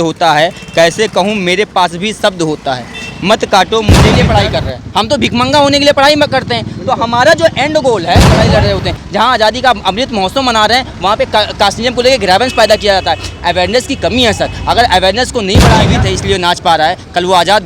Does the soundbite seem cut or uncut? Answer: cut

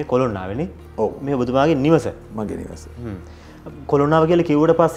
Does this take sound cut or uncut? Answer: uncut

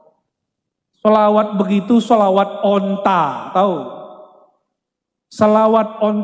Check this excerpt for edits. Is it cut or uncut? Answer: uncut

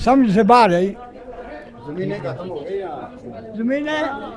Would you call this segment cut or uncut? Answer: uncut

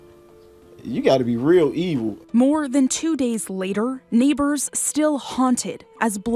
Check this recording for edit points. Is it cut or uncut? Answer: uncut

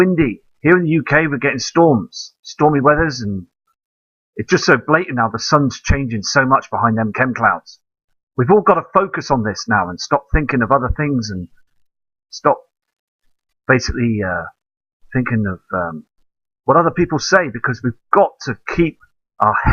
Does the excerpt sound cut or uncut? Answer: cut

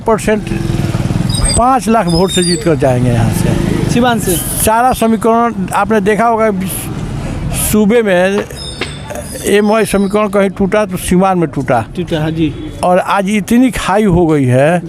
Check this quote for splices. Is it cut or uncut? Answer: uncut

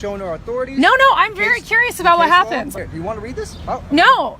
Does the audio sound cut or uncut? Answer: cut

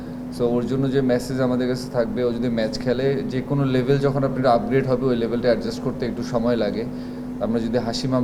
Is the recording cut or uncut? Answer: uncut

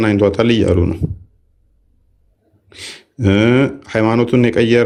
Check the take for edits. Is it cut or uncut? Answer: uncut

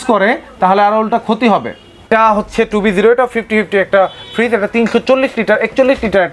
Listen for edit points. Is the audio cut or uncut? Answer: cut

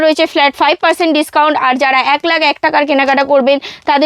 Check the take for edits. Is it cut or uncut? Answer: uncut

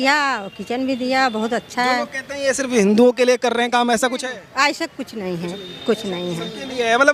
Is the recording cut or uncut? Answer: uncut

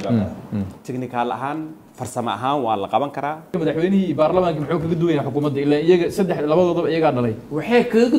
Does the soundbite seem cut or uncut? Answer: cut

